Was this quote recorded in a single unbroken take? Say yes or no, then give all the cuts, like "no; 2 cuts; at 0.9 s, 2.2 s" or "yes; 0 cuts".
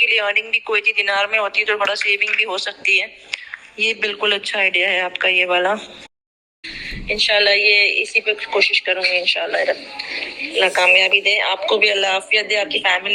no; 1 cut; at 6.4 s